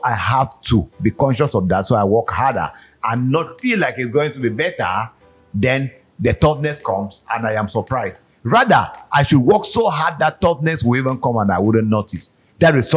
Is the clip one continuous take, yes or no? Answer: yes